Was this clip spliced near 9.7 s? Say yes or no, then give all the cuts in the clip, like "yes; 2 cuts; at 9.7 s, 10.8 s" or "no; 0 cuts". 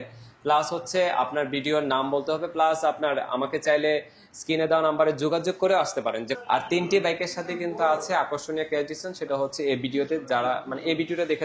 no; 1 cut; at 6.3 s